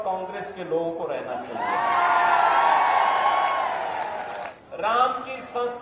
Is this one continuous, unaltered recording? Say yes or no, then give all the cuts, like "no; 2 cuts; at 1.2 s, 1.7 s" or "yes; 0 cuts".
no; 1 cut; at 4.6 s